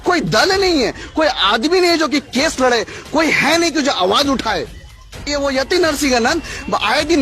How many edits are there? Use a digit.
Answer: 1